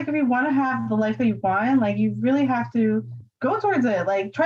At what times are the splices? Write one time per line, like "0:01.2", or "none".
0:03.2